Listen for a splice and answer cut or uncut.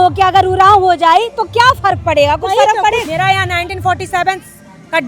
cut